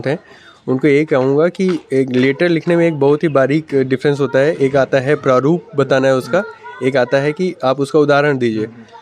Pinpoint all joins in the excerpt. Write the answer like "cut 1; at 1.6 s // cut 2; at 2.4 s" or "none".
none